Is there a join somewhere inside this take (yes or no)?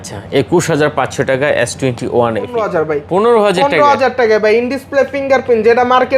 yes